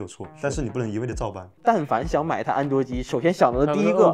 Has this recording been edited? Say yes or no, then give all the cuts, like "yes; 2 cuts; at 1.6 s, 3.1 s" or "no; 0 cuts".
yes; 1 cut; at 1.6 s